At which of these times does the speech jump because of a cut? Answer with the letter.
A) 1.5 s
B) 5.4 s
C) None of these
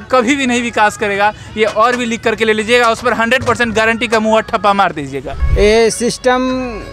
B